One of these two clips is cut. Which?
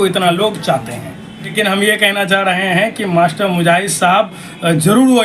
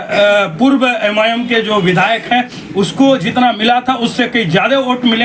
first; 1 cut; at 1.5 s

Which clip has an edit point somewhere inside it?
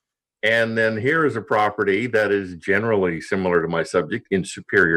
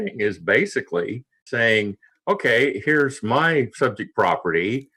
second; 1 cut; at 1.5 s

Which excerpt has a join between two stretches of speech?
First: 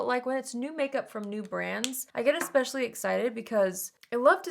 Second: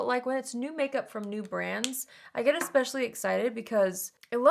first; 1 cut; at 2.0 s

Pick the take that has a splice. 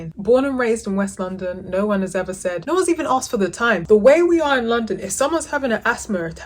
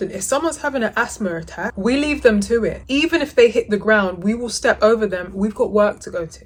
first; 2 cuts; at 2.6 s, 3.8 s

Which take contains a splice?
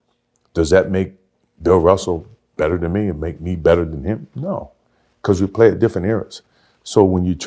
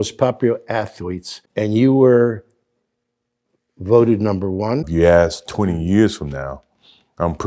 second; 2 cuts; at 1.4 s, 4.9 s

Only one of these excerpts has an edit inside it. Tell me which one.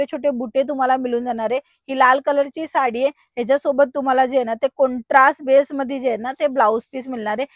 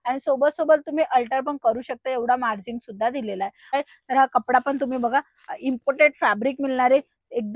second; 1 cut; at 3.7 s

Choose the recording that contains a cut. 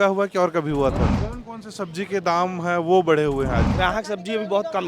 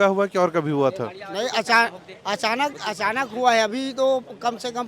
first; 2 cuts; at 1.2 s, 3.7 s

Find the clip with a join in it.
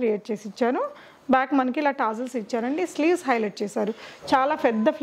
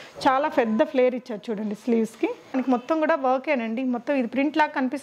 second; 1 cut; at 2.5 s

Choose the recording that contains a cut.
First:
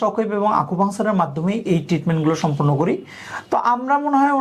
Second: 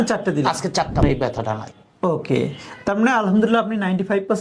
second; 1 cut; at 1.0 s

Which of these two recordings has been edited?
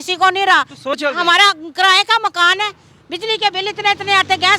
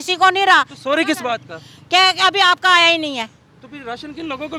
first; 1 cut; at 0.9 s

